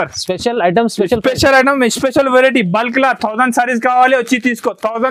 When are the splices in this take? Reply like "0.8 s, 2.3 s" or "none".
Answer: none